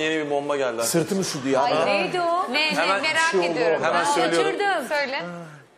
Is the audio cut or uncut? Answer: uncut